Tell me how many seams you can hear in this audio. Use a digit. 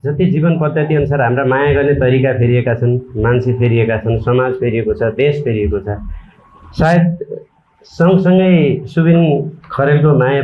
0